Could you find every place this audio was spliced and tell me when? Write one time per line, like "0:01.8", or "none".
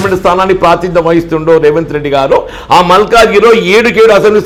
none